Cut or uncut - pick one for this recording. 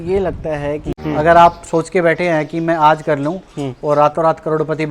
cut